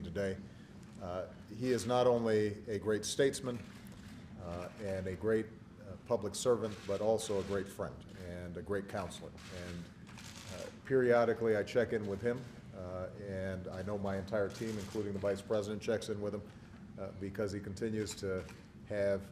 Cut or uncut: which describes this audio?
cut